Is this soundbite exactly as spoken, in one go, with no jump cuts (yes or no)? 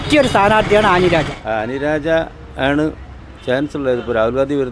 no